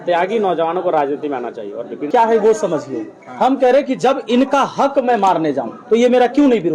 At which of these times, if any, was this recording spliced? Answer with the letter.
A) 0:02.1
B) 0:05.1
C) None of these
A